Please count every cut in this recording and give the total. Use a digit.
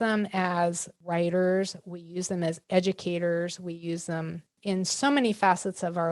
2